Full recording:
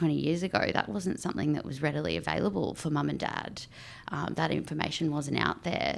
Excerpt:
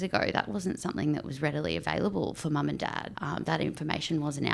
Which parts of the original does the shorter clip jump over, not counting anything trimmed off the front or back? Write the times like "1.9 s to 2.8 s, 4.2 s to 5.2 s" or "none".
3.5 s to 4.0 s